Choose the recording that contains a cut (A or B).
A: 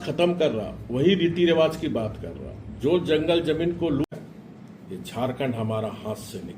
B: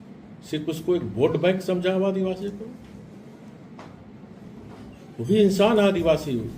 A